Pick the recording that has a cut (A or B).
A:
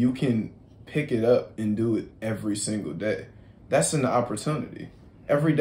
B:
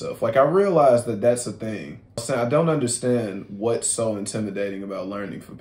B